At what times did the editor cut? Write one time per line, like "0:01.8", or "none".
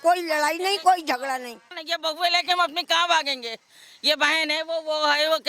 0:01.8